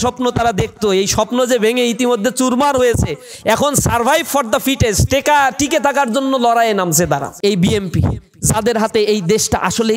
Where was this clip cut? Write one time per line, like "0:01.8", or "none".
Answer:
0:07.3